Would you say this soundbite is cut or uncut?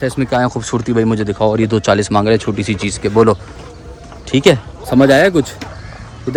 uncut